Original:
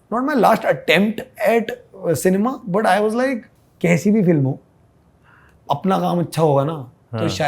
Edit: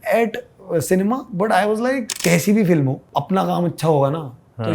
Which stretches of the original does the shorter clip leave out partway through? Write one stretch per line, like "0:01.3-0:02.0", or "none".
0:03.4-0:03.7
0:04.6-0:05.6